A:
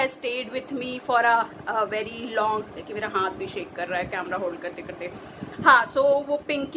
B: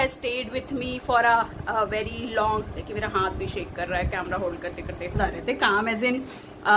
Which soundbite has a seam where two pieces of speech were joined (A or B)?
B